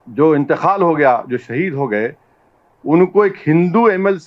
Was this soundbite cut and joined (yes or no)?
no